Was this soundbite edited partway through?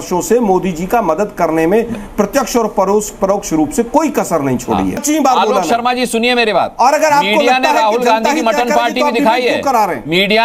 yes; 1 cut; at 5.0 s

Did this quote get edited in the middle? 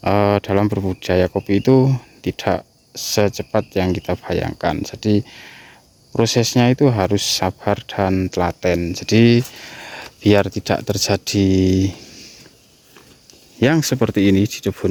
no; 0 cuts

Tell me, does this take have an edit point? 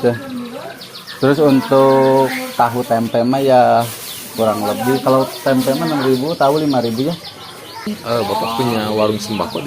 yes; 1 cut; at 7.9 s

